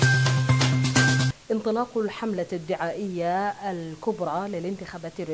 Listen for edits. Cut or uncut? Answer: cut